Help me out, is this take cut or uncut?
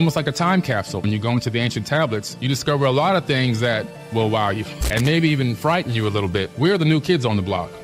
cut